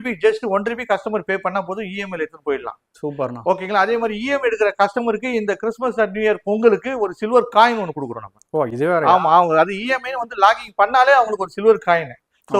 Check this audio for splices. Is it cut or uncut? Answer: uncut